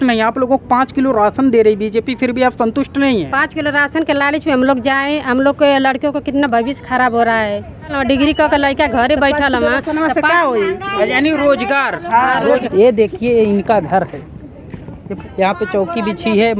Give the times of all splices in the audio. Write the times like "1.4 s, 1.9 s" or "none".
7.9 s, 12.7 s, 15.1 s